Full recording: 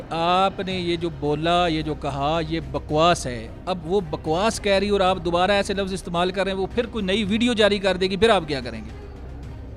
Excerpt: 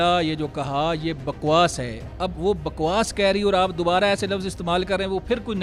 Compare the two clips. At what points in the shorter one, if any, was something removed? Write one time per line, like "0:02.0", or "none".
none